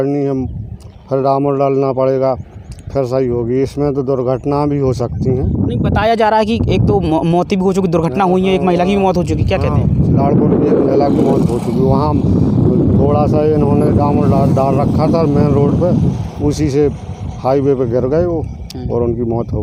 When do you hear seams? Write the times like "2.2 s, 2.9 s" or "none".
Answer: none

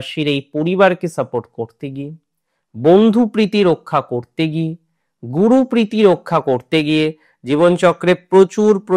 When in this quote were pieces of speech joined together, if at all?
none

